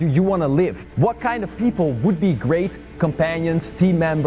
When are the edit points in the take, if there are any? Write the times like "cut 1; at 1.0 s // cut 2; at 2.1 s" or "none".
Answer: none